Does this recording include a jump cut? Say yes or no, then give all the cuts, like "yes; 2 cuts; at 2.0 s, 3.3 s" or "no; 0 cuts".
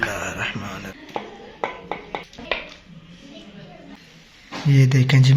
yes; 3 cuts; at 1.0 s, 2.3 s, 3.9 s